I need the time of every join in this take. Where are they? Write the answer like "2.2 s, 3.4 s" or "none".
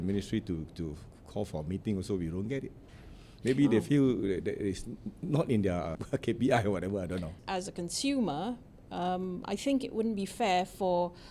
6.0 s, 7.4 s

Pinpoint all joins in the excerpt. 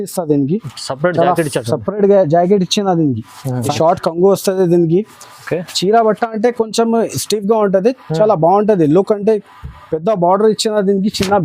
3.6 s

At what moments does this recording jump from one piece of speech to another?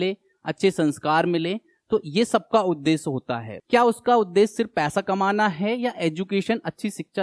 3.5 s

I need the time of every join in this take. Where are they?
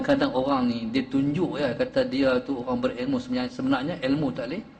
none

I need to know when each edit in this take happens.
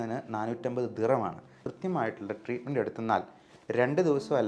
1.5 s

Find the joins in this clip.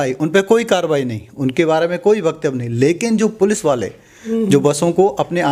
none

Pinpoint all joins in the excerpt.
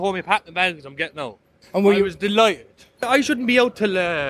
1.5 s, 3.1 s

